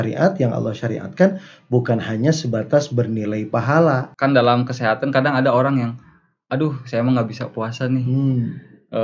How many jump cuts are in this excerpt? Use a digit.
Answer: 1